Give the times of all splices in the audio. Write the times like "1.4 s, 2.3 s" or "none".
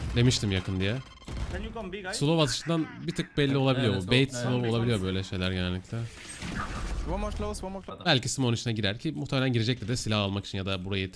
7.9 s